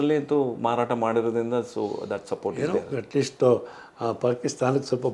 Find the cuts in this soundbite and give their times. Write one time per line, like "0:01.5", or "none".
none